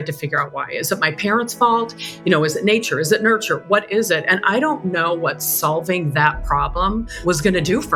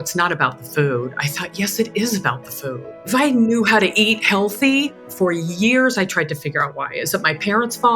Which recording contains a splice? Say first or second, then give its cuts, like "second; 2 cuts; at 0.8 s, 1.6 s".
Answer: second; 2 cuts; at 3.0 s, 5.0 s